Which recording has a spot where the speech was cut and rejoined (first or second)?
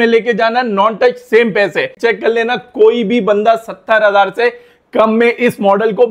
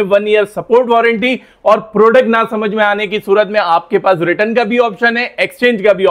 first